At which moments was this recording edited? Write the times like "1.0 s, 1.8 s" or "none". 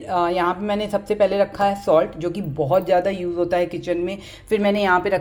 none